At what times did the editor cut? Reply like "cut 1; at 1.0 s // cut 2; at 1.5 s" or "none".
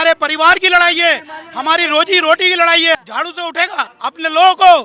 cut 1; at 3.0 s // cut 2; at 3.9 s